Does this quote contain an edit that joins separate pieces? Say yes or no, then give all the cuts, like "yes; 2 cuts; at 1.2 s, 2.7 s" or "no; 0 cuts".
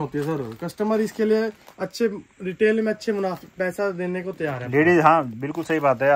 no; 0 cuts